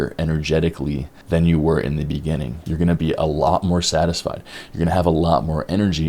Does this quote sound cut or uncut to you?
cut